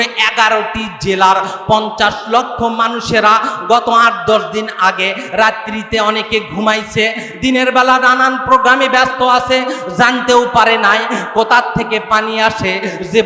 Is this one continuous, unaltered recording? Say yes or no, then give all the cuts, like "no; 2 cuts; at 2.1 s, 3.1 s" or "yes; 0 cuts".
yes; 0 cuts